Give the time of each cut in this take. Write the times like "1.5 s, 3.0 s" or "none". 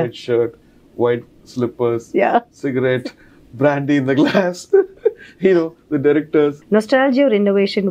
6.6 s